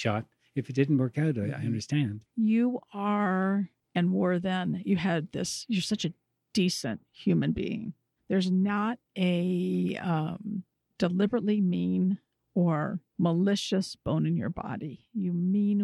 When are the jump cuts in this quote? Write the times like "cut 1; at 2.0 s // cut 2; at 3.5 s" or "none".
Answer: cut 1; at 2.2 s // cut 2; at 6.3 s // cut 3; at 9.0 s // cut 4; at 13.0 s